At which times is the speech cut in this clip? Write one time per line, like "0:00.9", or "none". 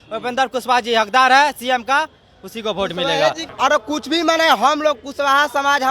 0:03.4